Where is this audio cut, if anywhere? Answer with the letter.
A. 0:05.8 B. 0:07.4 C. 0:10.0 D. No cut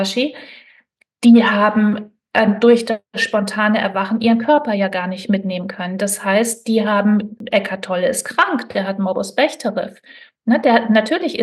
B